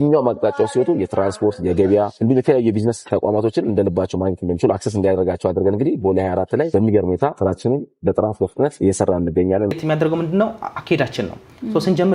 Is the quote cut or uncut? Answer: cut